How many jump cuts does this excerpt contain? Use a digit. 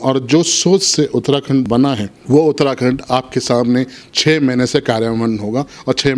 1